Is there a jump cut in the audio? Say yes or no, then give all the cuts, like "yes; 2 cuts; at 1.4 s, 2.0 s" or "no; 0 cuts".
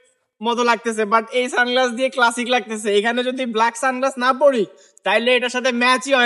no; 0 cuts